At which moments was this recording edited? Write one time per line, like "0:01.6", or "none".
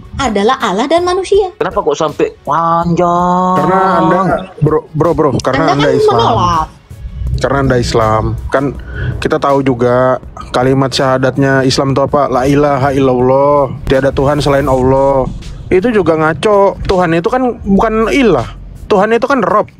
0:01.5